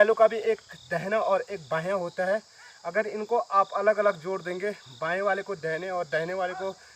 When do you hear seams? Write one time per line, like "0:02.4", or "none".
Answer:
none